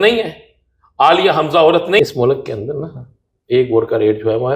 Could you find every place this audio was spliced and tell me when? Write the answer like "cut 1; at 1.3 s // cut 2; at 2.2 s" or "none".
cut 1; at 2.0 s